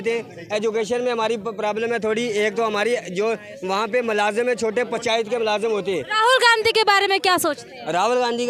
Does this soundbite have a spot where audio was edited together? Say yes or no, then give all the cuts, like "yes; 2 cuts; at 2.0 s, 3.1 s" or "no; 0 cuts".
no; 0 cuts